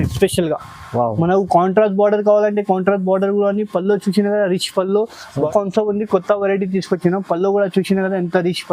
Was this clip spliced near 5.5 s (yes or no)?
yes